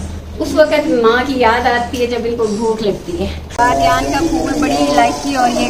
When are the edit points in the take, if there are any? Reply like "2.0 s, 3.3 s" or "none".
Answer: 3.5 s